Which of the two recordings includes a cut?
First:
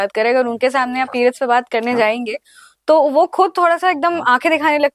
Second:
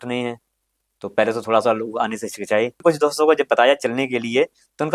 second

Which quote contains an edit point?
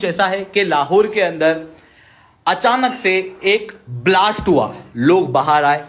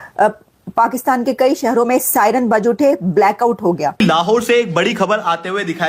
second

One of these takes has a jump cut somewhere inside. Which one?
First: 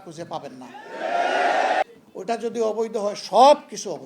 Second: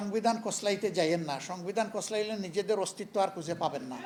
first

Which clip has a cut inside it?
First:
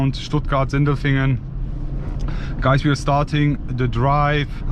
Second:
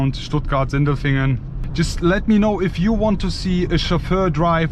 second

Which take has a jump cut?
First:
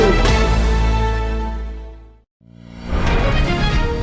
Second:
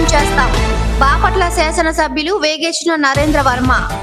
first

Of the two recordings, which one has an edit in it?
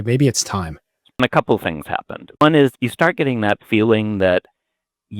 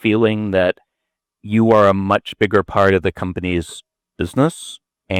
first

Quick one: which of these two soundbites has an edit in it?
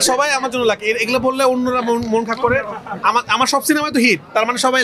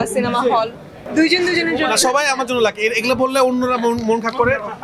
second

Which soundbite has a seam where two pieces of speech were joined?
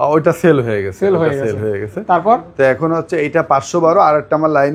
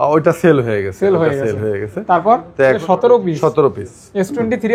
second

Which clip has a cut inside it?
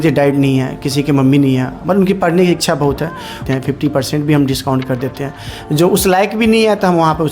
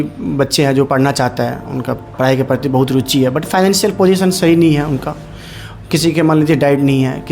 first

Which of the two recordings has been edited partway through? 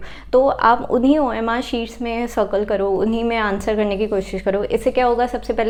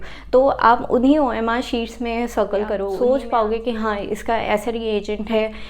second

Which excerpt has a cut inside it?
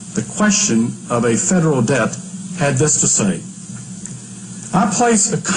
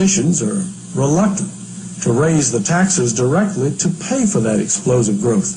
first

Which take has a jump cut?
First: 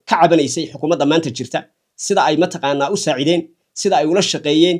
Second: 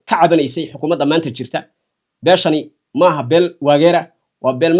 second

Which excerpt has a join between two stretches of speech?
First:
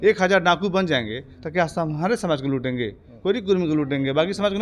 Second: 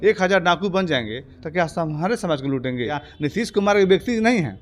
second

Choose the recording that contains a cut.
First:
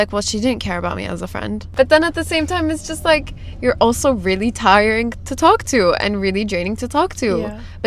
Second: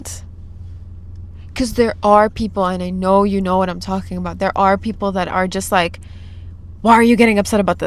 first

